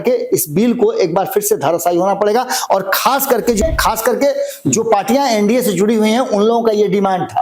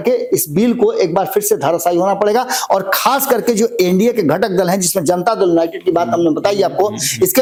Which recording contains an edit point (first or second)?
first